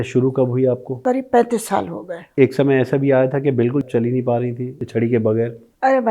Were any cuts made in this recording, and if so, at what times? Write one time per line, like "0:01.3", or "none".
0:01.0
0:02.3
0:03.9
0:04.8